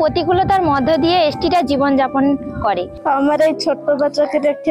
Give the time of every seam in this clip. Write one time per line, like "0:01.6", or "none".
0:02.9